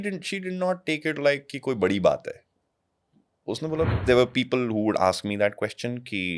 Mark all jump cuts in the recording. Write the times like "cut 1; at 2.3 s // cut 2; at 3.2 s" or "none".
cut 1; at 4.0 s